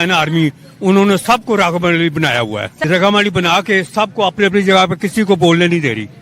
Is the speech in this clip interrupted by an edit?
yes; 1 cut; at 2.8 s

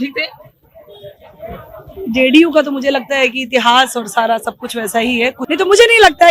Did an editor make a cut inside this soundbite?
yes; 1 cut; at 5.4 s

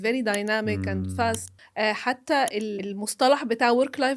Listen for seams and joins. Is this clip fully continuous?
no; 2 cuts; at 1.6 s, 2.8 s

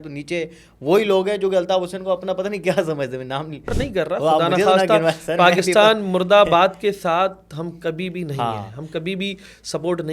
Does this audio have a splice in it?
yes; 1 cut; at 3.8 s

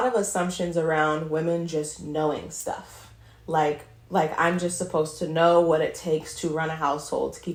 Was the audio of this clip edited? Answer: no; 0 cuts

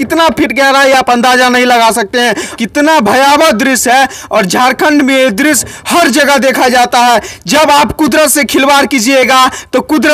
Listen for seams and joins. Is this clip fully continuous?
no; 1 cut; at 2.5 s

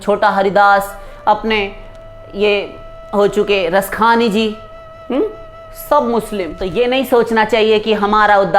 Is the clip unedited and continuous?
no; 1 cut; at 6.6 s

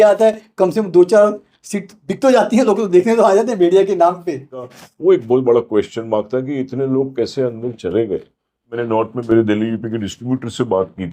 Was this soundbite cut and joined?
yes; 2 cuts; at 4.7 s, 8.8 s

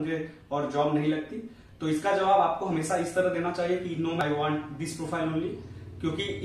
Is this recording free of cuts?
yes; 0 cuts

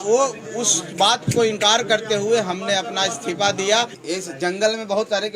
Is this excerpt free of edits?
no; 1 cut; at 4.0 s

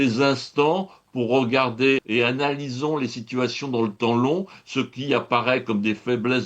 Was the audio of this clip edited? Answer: yes; 1 cut; at 2.0 s

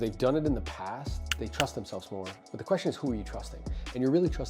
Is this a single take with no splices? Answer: no; 1 cut; at 2.4 s

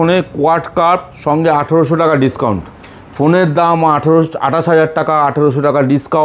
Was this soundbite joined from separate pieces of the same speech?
no; 0 cuts

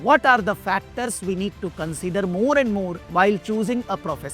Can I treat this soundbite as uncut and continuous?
no; 1 cut; at 3.0 s

